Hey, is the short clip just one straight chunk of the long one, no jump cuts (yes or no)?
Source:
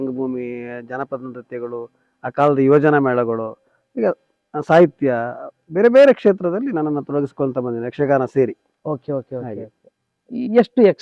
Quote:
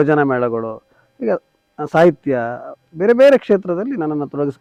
yes